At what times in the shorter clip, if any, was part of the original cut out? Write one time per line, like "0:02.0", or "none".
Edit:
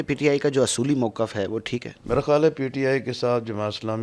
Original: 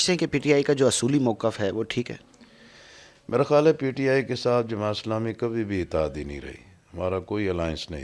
0:01.9